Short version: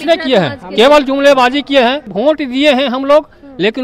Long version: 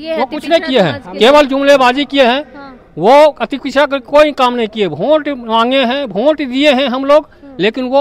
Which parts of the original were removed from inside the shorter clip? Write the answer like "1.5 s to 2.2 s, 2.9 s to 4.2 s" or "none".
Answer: 2.5 s to 6.1 s